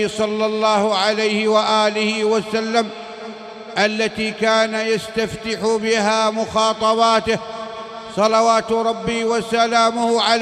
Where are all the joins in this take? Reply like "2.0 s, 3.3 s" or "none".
none